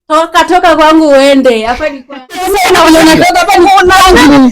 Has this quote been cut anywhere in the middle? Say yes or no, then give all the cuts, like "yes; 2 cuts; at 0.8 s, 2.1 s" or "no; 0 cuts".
yes; 1 cut; at 2.4 s